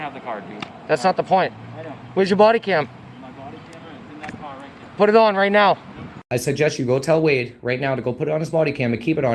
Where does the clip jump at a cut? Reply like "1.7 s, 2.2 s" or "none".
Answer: 6.3 s